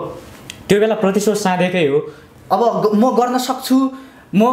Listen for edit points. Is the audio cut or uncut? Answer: cut